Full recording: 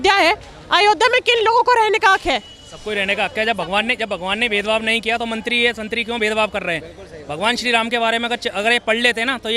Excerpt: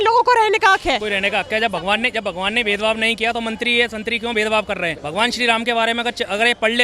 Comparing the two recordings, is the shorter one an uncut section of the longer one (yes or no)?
no